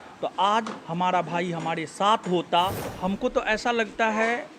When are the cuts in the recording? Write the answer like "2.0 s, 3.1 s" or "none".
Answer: 2.9 s